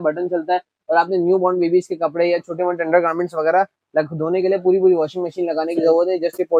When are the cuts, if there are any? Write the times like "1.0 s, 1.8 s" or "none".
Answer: none